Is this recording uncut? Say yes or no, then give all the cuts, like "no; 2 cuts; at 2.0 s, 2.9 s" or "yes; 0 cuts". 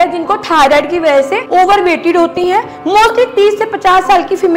yes; 0 cuts